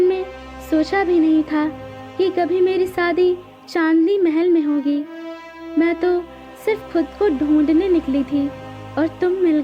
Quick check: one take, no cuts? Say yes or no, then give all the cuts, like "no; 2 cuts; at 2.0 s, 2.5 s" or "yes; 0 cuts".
yes; 0 cuts